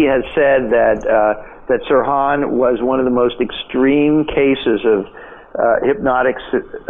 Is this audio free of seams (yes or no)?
yes